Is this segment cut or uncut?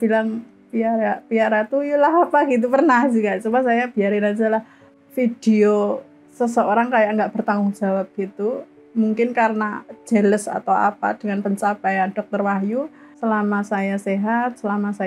cut